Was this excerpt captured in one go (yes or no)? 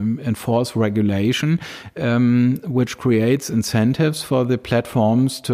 yes